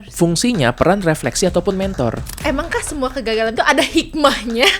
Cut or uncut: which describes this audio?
cut